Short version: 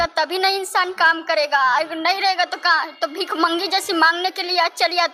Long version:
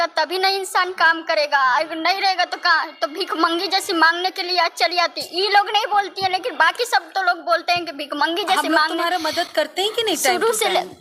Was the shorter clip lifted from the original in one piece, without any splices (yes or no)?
yes